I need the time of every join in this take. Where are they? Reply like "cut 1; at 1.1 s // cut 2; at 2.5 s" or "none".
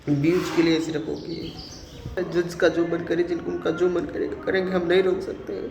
cut 1; at 2.2 s